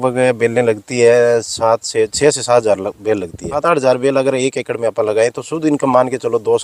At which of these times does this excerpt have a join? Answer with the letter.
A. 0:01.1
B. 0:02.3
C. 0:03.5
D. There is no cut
C